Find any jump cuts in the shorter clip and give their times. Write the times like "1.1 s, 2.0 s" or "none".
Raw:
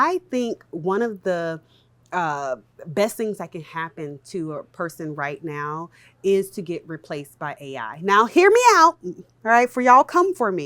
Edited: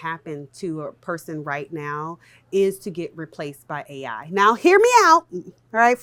none